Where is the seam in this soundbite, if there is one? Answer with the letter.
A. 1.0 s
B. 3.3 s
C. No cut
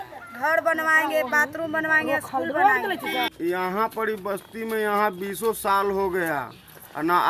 B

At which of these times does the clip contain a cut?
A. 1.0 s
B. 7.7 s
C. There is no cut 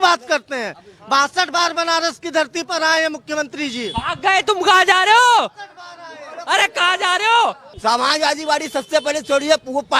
B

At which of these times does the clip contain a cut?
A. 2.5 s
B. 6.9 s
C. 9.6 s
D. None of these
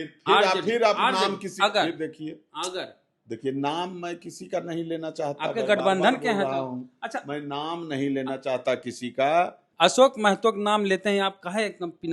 C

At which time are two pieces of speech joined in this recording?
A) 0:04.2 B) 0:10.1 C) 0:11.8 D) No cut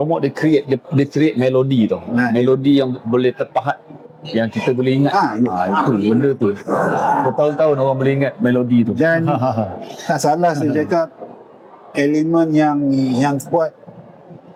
D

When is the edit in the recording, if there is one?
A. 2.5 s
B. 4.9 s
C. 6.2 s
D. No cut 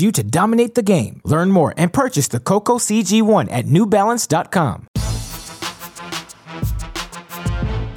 B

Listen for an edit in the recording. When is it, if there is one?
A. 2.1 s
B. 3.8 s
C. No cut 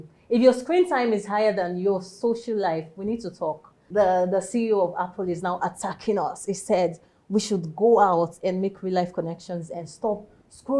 B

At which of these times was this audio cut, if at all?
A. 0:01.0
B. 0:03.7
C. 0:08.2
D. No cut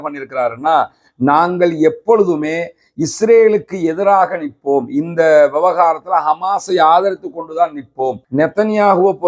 C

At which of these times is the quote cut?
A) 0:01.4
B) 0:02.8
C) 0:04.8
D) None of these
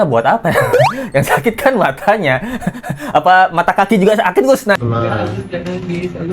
C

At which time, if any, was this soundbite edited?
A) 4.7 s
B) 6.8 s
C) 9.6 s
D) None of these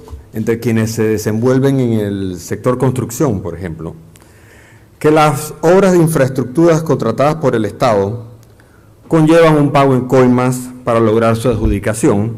D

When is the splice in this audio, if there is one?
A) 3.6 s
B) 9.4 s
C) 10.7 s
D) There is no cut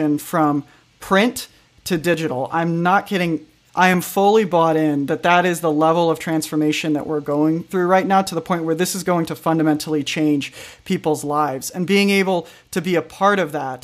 A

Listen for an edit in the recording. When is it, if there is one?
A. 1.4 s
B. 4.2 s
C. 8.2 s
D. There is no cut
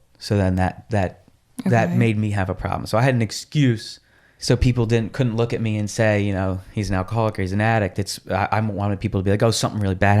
B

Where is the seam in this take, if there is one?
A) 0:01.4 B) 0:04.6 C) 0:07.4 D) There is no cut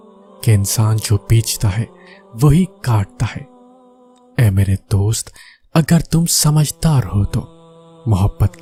D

